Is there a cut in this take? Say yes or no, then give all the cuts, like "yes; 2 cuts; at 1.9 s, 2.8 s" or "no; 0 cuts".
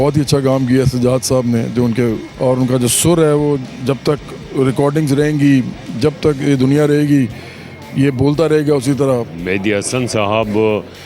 yes; 2 cuts; at 2.3 s, 9.3 s